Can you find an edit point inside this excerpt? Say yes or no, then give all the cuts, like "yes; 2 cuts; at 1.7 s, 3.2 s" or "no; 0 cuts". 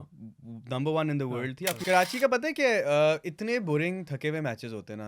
yes; 1 cut; at 1.8 s